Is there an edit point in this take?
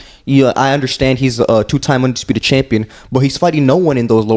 no; 0 cuts

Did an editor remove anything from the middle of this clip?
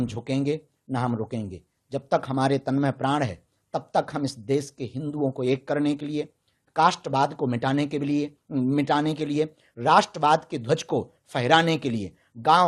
no; 0 cuts

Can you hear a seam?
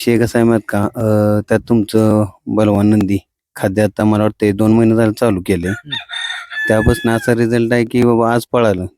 no; 0 cuts

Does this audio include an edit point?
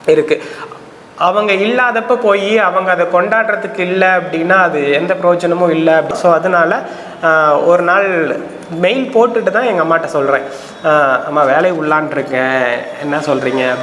yes; 1 cut; at 6.1 s

